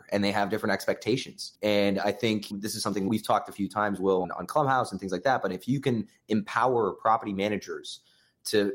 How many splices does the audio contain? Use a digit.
3